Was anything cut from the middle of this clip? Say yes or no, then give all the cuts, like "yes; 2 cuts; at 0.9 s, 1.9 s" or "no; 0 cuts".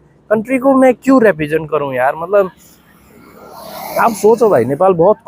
no; 0 cuts